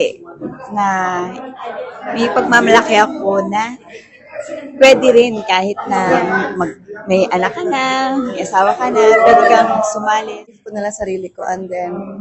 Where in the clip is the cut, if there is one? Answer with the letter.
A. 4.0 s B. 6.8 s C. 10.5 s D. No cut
C